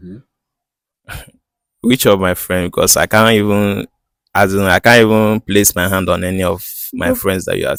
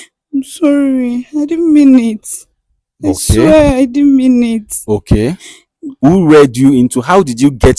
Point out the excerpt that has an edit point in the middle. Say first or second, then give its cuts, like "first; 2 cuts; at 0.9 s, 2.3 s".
second; 1 cut; at 6.0 s